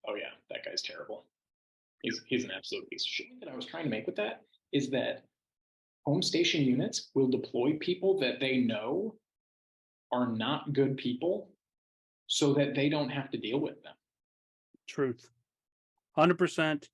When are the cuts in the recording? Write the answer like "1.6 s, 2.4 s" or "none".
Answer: 3.6 s